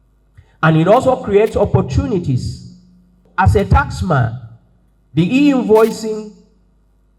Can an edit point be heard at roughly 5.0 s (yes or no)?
no